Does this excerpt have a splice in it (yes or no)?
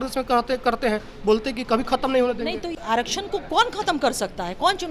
yes